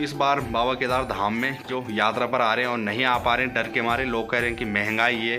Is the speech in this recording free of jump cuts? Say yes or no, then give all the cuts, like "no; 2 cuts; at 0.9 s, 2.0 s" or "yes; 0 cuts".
no; 1 cut; at 1.6 s